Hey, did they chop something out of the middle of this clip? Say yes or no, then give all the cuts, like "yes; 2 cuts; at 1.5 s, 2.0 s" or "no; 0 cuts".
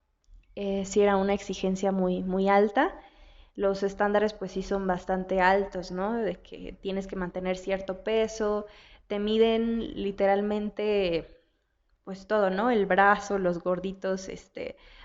no; 0 cuts